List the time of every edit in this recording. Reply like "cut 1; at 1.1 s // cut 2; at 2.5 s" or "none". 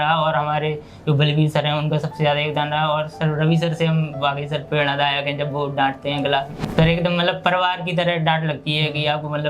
cut 1; at 6.6 s